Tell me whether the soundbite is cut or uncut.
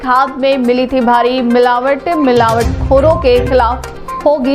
uncut